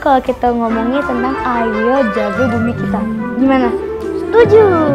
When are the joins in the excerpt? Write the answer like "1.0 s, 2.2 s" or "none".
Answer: none